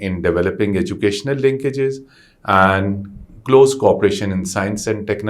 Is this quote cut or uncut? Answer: uncut